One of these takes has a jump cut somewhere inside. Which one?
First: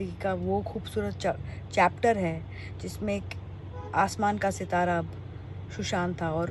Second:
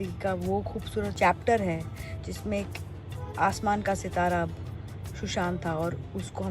second; 1 cut; at 1.1 s

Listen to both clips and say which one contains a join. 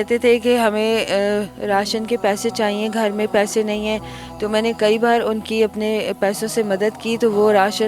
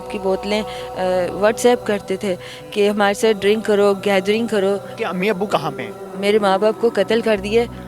second; 1 cut; at 4.9 s

